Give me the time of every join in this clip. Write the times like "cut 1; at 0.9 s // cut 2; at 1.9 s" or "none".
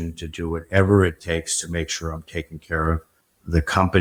none